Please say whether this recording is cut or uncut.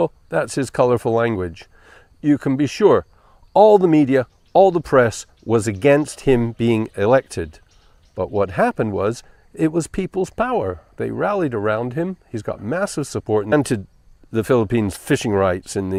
uncut